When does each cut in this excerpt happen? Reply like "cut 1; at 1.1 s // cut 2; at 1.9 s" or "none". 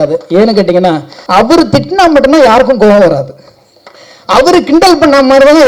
cut 1; at 1.1 s